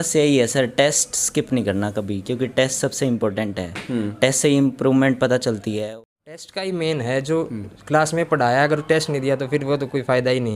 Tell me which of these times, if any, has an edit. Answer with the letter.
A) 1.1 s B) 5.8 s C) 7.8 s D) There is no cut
B